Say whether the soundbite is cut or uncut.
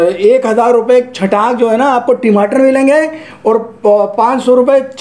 uncut